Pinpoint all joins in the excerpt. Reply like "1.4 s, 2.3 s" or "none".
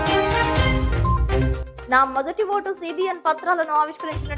none